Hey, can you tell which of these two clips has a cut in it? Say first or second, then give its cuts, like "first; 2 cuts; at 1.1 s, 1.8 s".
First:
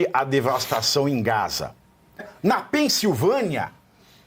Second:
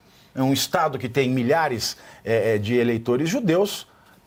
first; 1 cut; at 2.3 s